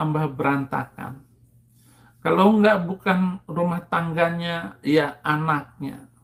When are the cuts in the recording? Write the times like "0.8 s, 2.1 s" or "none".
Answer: none